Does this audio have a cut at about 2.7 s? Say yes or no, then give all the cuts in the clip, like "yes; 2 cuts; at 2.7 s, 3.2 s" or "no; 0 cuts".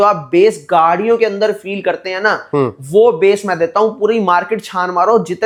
no; 0 cuts